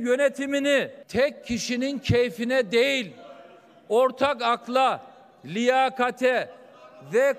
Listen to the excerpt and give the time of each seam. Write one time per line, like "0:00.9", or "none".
0:01.0